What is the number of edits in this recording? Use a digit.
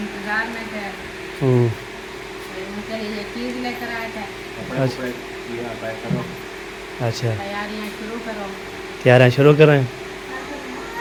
0